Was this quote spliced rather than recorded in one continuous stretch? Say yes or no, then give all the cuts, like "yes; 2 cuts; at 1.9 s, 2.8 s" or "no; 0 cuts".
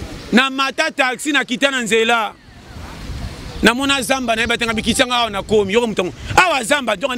no; 0 cuts